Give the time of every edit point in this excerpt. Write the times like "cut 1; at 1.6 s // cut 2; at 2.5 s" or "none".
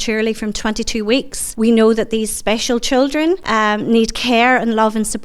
cut 1; at 1.4 s // cut 2; at 3.4 s